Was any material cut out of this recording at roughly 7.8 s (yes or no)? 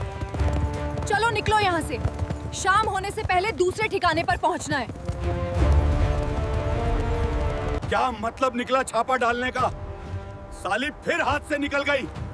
yes